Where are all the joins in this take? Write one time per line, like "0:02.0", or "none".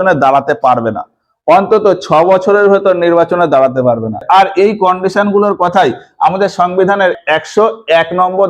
0:04.2
0:07.2

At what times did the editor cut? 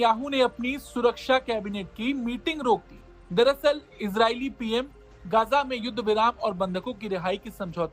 none

